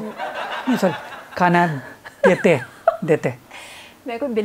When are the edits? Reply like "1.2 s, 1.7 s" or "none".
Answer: none